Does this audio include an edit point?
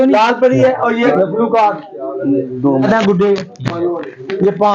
yes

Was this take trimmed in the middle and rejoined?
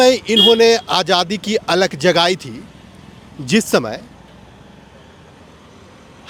no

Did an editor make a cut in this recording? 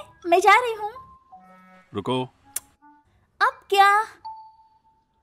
no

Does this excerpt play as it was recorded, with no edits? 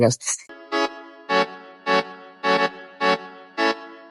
yes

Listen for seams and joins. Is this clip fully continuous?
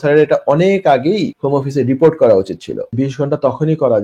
no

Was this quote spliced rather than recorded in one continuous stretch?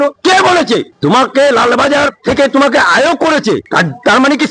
no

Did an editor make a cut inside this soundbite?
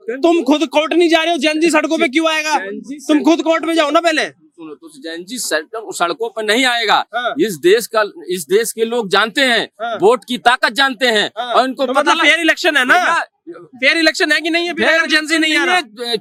no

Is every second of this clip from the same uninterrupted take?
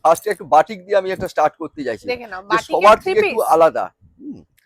yes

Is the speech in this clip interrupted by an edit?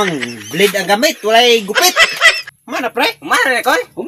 yes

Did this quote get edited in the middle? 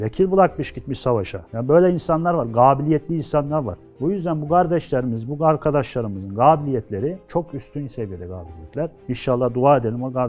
no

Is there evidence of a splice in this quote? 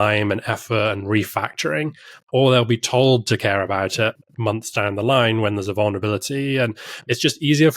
yes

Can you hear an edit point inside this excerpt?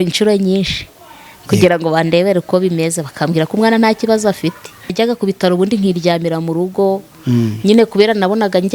yes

